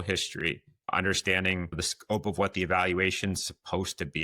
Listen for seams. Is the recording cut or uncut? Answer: cut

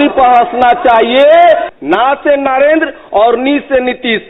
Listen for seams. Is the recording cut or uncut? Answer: cut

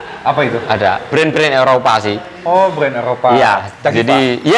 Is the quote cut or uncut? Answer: uncut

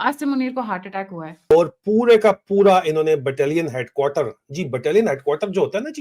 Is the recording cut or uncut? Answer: cut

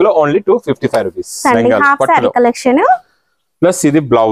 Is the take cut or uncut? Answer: cut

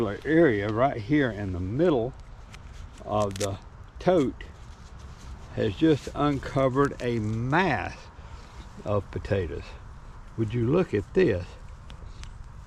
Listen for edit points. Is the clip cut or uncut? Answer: uncut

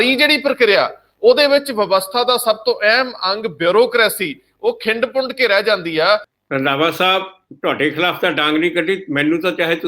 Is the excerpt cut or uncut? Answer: cut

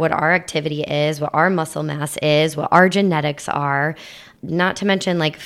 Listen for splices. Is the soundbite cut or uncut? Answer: cut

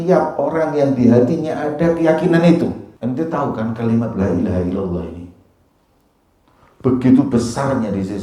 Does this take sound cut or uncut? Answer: cut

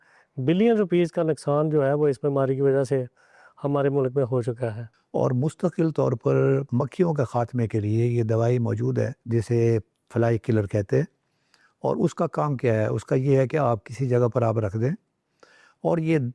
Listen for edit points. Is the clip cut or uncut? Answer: cut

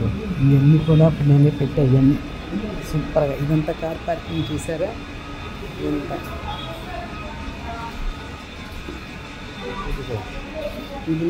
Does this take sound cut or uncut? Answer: uncut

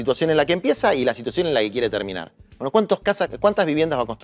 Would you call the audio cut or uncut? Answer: uncut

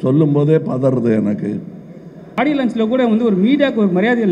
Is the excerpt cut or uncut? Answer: cut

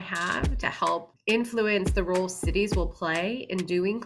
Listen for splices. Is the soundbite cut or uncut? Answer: cut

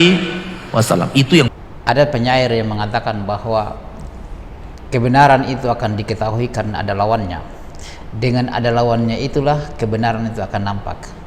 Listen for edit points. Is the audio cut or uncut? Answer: cut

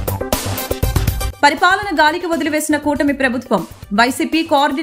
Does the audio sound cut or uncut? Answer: cut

